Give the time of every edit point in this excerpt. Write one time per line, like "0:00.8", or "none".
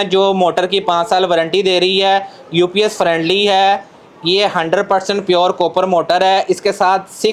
none